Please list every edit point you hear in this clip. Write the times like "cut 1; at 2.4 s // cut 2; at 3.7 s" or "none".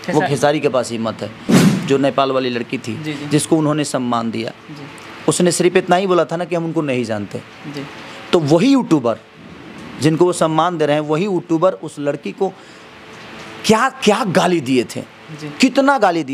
cut 1; at 1.6 s